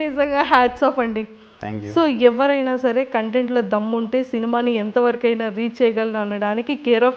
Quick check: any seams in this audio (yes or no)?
no